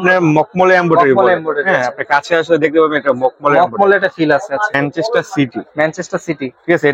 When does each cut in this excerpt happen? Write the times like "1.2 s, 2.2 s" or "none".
4.8 s

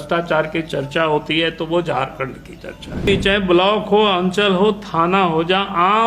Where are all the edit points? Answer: 3.1 s

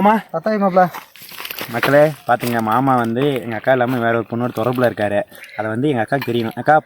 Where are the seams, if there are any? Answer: 1.1 s

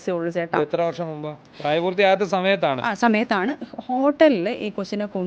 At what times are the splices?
1.5 s

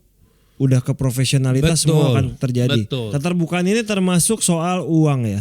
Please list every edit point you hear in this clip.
3.1 s

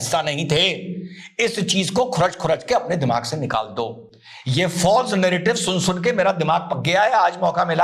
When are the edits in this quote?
none

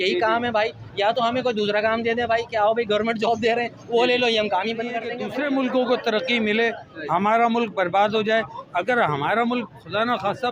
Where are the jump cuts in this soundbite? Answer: 5.2 s

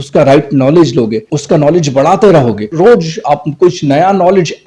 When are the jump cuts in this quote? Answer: 1.3 s, 2.7 s

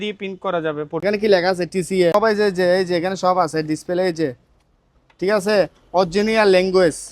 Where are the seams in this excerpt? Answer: 1.0 s, 2.1 s

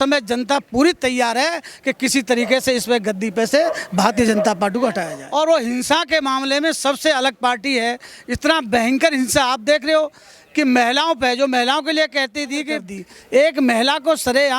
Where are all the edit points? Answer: 5.1 s, 12.8 s

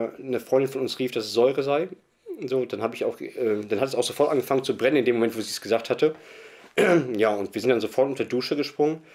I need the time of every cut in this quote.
none

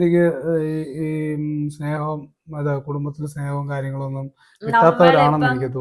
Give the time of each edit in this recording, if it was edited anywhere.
none

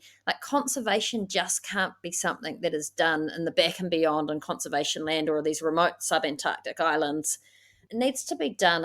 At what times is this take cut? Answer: 7.8 s

